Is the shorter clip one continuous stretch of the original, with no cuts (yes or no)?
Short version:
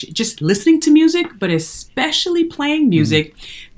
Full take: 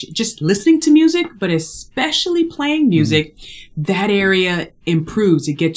yes